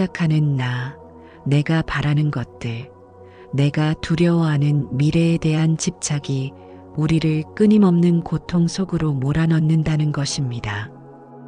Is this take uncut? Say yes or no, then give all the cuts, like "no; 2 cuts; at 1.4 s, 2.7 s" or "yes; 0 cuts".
yes; 0 cuts